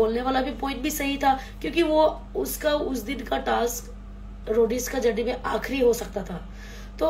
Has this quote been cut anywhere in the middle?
no; 0 cuts

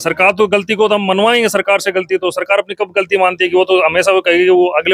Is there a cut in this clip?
no; 0 cuts

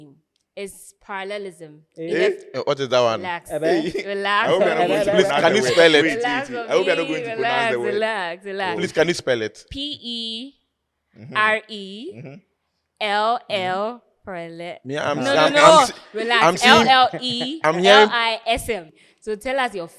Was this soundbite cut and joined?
yes; 1 cut; at 18.9 s

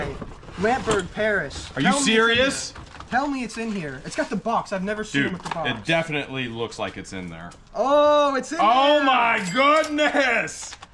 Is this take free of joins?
yes; 0 cuts

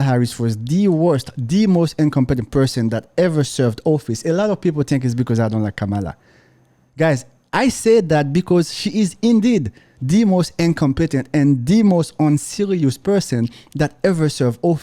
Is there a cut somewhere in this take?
no; 0 cuts

